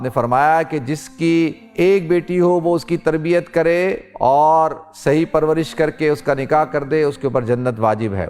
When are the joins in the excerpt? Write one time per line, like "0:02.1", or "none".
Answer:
0:01.6
0:04.1